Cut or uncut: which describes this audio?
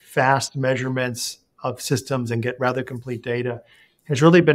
uncut